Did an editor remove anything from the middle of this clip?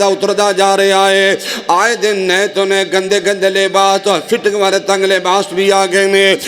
no; 0 cuts

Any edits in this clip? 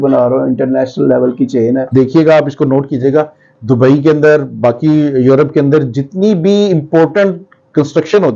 yes; 1 cut; at 1.9 s

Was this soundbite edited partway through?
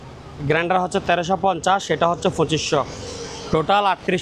no; 0 cuts

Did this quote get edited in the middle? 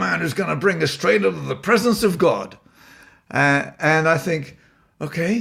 no; 0 cuts

